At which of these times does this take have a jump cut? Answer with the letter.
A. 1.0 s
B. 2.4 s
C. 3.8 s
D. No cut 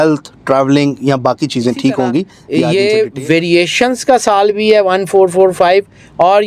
B